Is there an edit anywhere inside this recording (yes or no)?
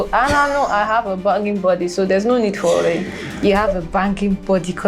no